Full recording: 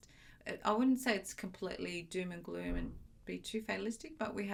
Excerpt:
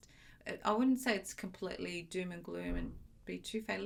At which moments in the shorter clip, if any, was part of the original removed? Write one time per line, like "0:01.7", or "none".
none